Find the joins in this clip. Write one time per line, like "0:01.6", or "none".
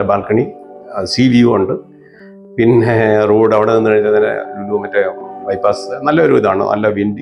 none